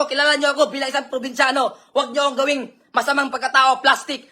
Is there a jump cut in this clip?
no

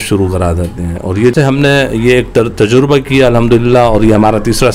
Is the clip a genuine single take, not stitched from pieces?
no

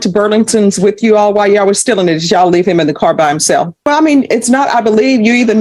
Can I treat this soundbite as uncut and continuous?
no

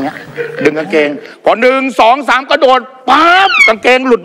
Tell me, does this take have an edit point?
no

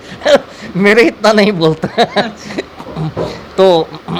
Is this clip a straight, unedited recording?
yes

